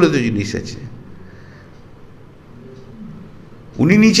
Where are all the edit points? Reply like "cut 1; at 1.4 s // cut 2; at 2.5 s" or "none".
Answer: none

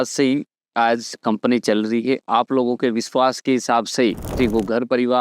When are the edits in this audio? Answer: cut 1; at 4.2 s

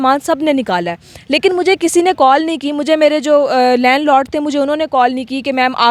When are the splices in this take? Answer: none

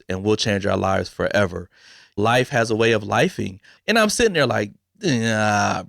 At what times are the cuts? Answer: cut 1; at 2.2 s

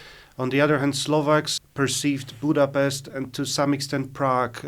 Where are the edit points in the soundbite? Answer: cut 1; at 1.5 s

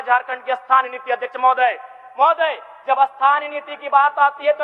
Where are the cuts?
none

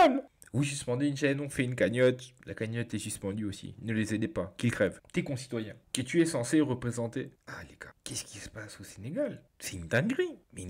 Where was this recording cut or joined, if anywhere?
none

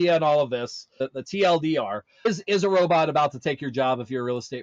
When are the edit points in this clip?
cut 1; at 1.0 s // cut 2; at 2.1 s

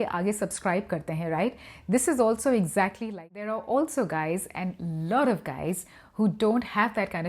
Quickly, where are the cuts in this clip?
cut 1; at 3.3 s

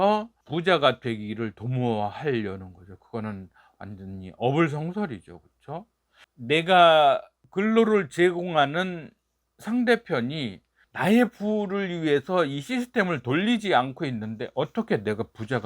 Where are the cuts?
cut 1; at 6.1 s

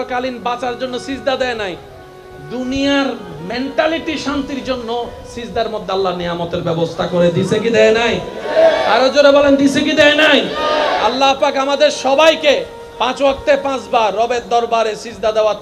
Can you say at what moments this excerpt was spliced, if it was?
none

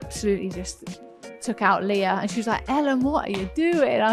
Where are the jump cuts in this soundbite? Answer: none

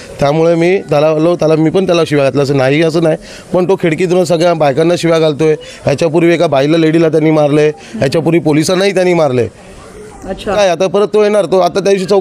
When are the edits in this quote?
cut 1; at 10.5 s

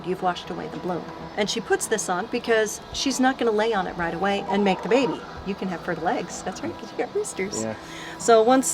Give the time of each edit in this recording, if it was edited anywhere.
cut 1; at 1.2 s // cut 2; at 5.3 s

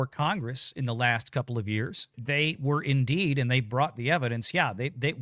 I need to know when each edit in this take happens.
cut 1; at 2.2 s

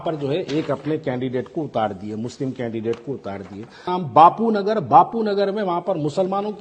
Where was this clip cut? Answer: cut 1; at 3.9 s

